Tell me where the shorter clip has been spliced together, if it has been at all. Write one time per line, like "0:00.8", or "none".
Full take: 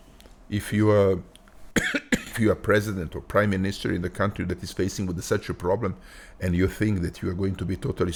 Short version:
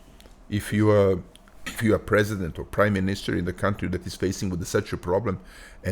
0:01.7